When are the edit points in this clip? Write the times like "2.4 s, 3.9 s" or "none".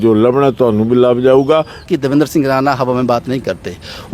1.9 s